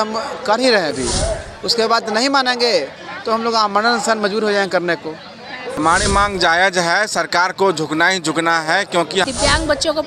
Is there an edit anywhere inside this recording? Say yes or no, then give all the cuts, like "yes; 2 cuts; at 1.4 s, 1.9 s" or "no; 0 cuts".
yes; 2 cuts; at 5.7 s, 9.2 s